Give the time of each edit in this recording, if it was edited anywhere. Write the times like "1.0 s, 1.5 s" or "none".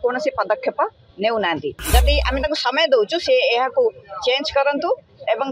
1.8 s